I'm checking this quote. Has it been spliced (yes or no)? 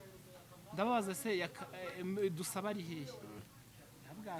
yes